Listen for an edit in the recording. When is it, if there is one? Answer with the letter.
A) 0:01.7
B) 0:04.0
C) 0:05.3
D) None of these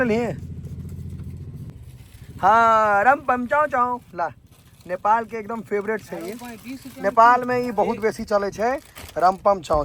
A